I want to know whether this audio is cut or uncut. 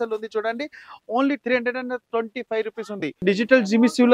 cut